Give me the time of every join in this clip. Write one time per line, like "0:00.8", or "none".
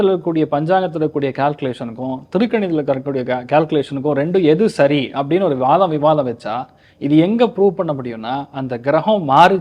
none